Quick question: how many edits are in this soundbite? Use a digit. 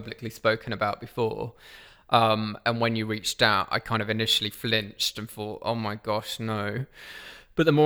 0